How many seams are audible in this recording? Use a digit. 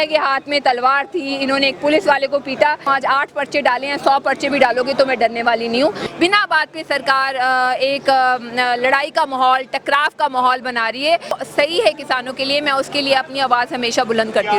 3